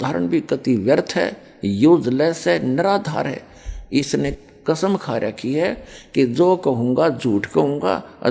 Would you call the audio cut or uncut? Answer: uncut